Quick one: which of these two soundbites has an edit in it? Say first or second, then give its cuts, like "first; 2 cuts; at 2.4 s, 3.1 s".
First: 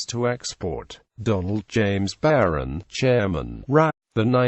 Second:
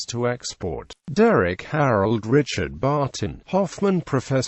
second; 1 cut; at 0.9 s